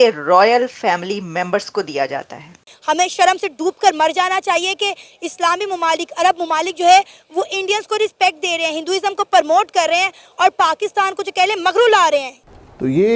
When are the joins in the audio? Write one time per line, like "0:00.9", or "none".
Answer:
none